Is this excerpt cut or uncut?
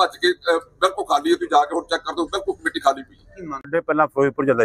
cut